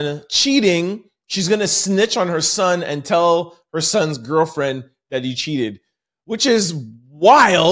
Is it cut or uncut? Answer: uncut